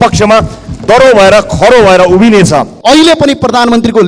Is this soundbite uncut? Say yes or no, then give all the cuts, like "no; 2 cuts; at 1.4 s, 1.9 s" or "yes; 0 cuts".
no; 1 cut; at 2.7 s